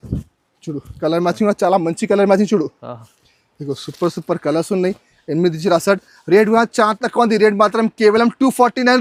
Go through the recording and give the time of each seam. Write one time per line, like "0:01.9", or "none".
none